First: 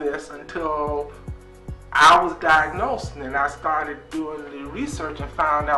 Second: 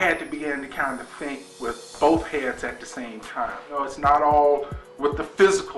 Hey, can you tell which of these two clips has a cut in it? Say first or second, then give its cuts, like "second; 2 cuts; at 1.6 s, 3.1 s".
second; 1 cut; at 3.6 s